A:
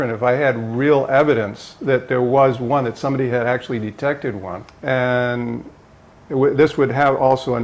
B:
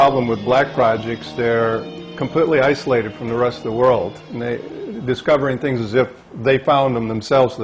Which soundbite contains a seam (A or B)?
A